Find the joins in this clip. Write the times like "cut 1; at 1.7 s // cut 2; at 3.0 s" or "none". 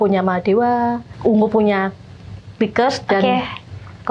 cut 1; at 1.1 s